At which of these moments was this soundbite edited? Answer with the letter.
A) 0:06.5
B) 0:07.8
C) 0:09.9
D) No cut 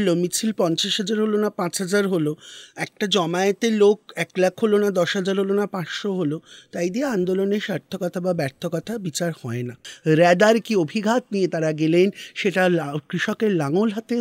C